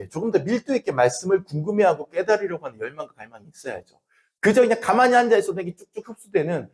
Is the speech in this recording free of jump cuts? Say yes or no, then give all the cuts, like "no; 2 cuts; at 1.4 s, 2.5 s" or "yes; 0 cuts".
yes; 0 cuts